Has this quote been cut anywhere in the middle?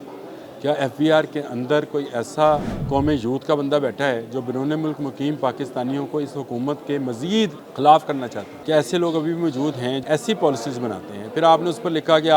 yes; 4 cuts; at 2.7 s, 7.6 s, 8.5 s, 10.0 s

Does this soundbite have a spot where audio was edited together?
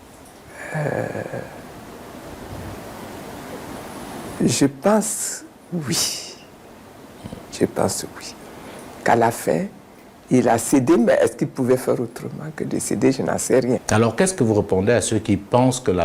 no; 0 cuts

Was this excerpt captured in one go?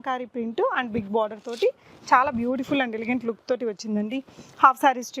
yes; 0 cuts

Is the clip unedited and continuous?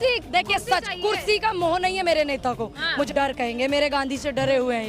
no; 1 cut; at 3.1 s

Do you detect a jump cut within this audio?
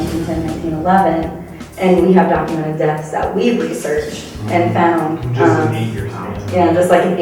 no; 0 cuts

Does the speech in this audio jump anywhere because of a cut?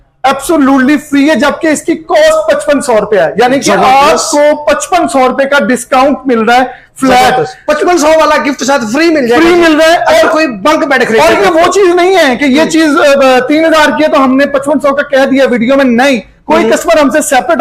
no; 0 cuts

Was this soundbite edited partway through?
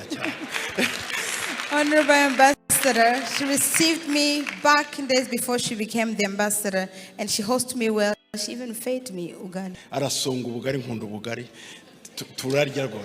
yes; 1 cut; at 9.8 s

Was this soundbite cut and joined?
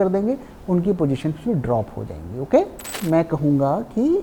yes; 1 cut; at 2.9 s

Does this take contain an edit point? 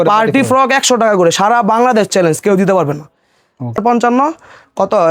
yes; 1 cut; at 3.8 s

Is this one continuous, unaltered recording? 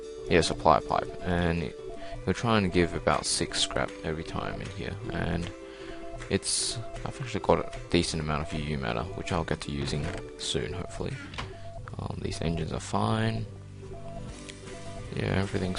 no; 1 cut; at 5.3 s

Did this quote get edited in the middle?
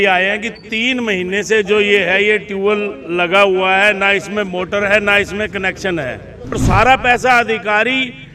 yes; 1 cut; at 6.6 s

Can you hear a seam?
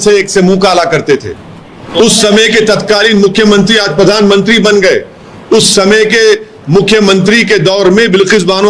yes; 1 cut; at 1.8 s

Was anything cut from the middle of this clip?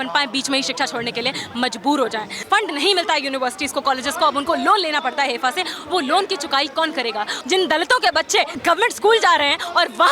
yes; 3 cuts; at 2.4 s, 7.3 s, 8.5 s

